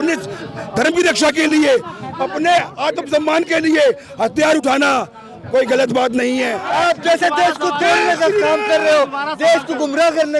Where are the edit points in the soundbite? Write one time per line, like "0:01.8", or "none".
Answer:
0:06.6